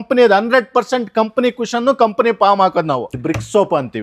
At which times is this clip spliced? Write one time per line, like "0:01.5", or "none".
0:03.1